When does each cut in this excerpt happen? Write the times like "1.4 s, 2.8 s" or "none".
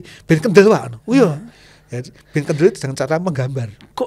none